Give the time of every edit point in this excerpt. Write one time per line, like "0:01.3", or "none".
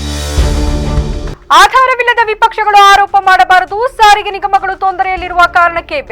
0:01.3